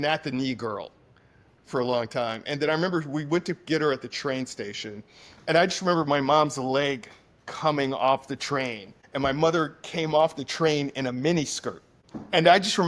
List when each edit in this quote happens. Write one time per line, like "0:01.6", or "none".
none